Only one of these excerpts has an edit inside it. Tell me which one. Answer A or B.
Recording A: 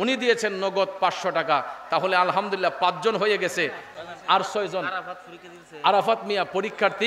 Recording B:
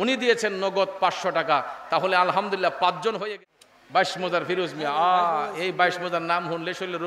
B